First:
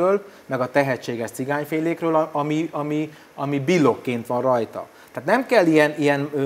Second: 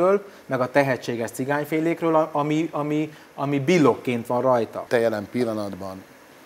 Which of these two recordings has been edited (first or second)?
second